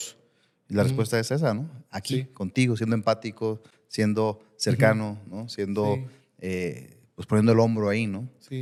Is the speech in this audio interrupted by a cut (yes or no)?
no